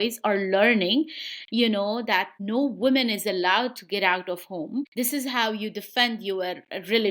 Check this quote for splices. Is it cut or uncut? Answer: uncut